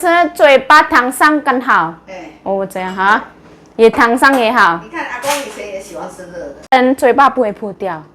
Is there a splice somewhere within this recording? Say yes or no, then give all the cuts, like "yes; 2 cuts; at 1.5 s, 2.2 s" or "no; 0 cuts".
yes; 1 cut; at 6.7 s